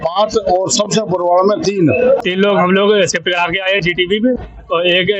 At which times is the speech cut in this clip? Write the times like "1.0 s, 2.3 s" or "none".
2.2 s